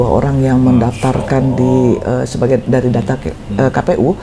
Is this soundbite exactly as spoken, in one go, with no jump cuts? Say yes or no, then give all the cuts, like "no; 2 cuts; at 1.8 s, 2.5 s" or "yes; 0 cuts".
yes; 0 cuts